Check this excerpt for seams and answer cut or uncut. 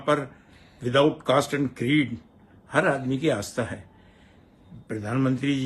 uncut